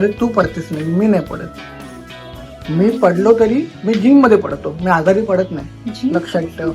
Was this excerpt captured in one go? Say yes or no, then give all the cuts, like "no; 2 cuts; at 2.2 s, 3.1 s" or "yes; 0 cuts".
yes; 0 cuts